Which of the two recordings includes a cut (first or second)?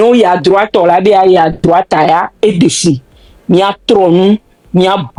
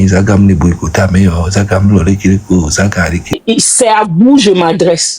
second